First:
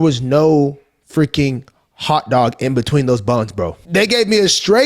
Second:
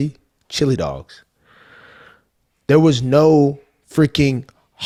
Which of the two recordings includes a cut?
first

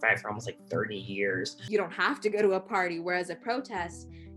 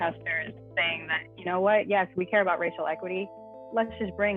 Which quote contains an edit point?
first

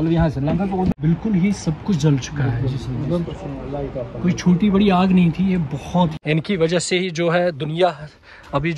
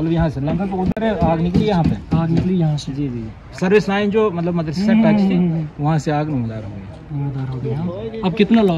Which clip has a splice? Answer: first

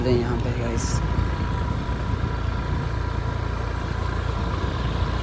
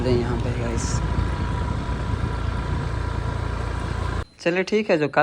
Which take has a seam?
second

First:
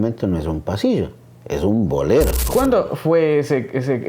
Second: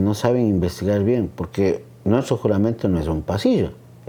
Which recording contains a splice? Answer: first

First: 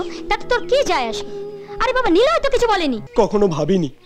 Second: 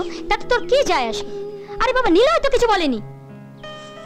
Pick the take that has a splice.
first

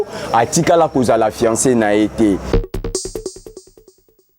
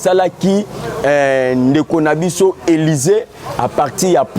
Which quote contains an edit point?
first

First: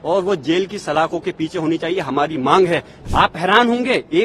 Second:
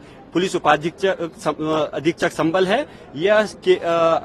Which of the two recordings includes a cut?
first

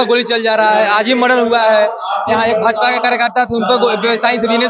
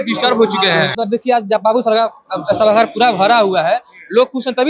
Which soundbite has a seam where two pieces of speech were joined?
second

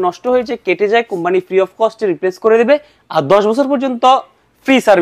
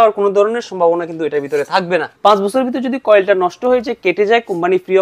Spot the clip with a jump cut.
second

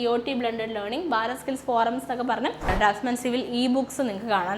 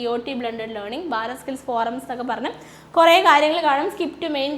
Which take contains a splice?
first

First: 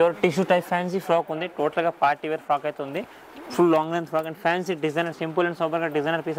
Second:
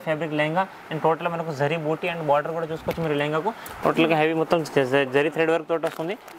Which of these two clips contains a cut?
second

